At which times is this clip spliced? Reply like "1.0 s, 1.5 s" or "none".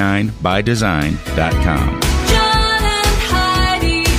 none

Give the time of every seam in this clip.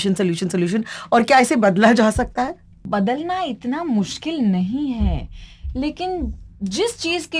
2.8 s

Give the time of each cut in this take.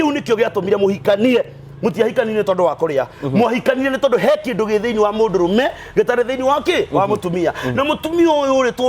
none

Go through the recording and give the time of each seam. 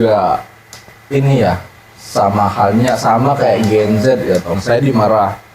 4.5 s

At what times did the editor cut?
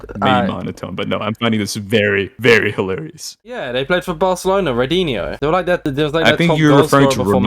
3.5 s

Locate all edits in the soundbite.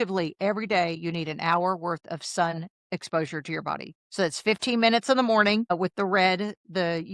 2.7 s, 5.8 s

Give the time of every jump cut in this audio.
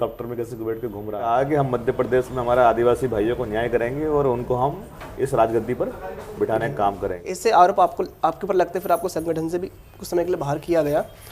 1.3 s, 7.3 s

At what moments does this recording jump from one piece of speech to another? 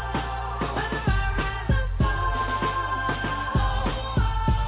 none

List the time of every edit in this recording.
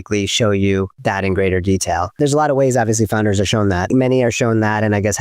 0.9 s, 2.1 s, 3.9 s

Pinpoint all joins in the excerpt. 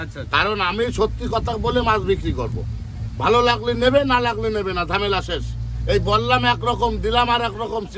none

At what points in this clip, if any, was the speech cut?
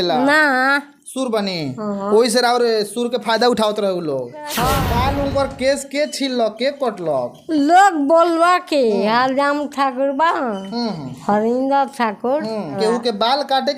4.6 s, 12.8 s

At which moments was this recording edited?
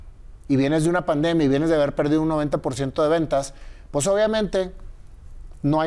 none

